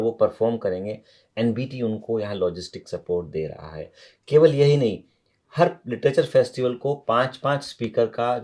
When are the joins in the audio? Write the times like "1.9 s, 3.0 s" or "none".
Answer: none